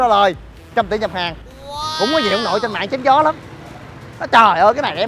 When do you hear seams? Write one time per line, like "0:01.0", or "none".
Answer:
0:01.9